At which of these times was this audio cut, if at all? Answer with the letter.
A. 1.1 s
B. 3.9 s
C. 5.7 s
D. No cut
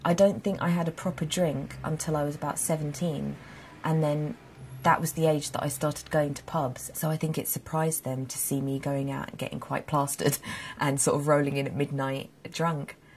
C